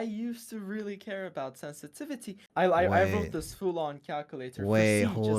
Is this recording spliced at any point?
yes; 1 cut; at 2.4 s

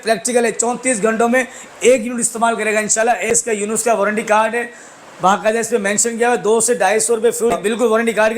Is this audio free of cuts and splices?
no; 2 cuts; at 3.3 s, 7.6 s

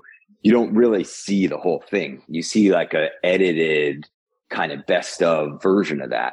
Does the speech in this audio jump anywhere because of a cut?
no; 0 cuts

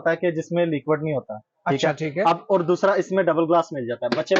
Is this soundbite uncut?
yes; 0 cuts

